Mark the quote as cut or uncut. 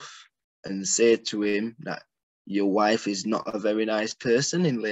uncut